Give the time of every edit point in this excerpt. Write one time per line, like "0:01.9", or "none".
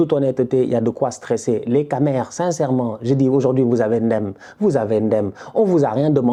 none